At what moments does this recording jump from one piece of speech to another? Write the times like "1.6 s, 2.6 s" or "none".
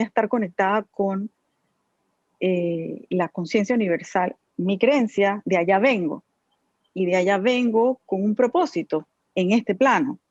4.4 s